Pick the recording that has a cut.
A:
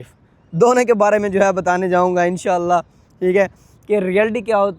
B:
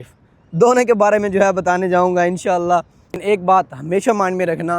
B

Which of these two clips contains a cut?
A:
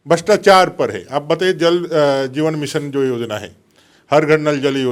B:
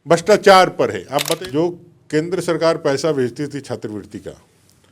B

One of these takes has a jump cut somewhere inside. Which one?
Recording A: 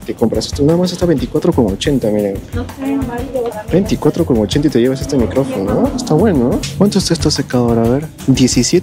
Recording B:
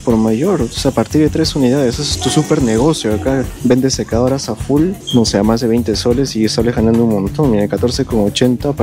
A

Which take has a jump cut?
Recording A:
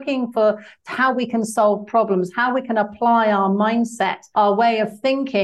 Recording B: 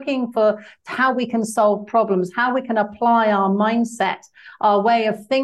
A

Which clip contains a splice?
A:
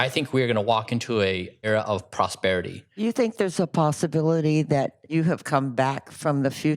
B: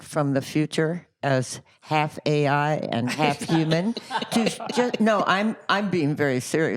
A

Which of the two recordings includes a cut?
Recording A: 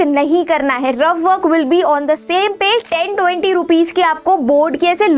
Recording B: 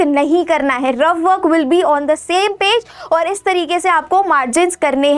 A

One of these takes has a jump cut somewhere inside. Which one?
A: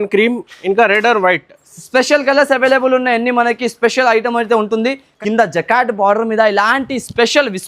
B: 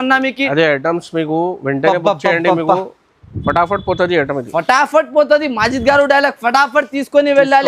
A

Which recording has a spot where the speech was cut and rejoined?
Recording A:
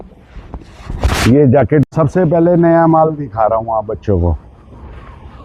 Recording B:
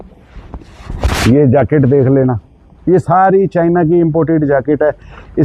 A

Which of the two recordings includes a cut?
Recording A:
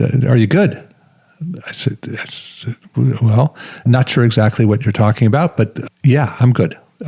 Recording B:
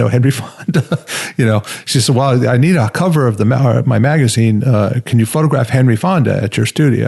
A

